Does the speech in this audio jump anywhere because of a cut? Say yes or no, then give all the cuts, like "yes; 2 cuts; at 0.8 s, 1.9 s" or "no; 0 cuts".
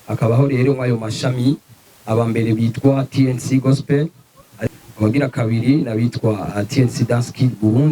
yes; 1 cut; at 4.5 s